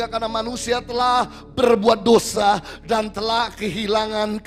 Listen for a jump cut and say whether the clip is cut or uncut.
uncut